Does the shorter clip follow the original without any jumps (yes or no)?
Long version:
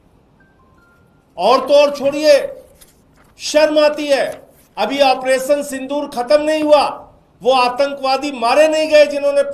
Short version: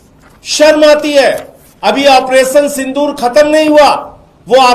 yes